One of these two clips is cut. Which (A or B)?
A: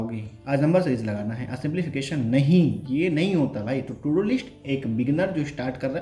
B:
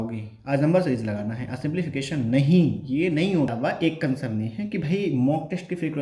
B